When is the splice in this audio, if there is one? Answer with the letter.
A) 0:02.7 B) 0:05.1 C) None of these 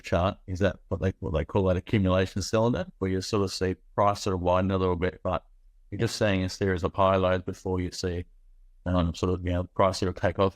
C